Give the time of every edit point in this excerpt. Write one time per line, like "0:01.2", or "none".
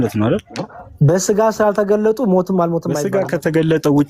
0:03.0